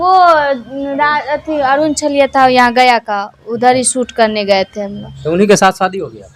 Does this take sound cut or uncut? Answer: uncut